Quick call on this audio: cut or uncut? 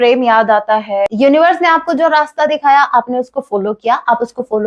cut